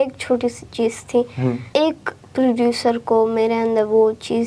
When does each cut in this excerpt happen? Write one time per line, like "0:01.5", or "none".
0:01.6